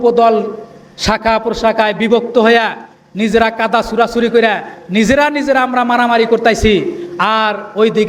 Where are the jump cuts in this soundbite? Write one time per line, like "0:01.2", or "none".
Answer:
none